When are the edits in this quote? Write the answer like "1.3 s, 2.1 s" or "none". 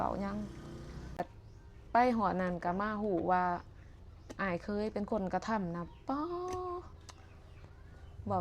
1.0 s